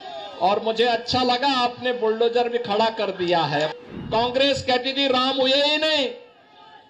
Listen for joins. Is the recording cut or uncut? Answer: cut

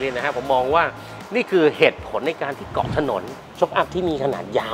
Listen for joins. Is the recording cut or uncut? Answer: cut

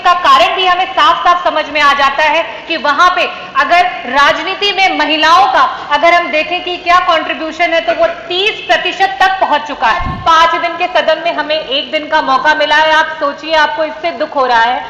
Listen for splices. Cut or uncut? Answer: cut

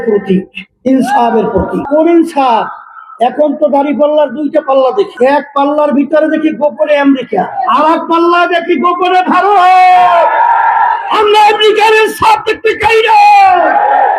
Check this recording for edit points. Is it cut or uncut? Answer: cut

